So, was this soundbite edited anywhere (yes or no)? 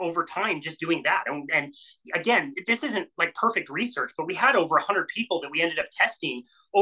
no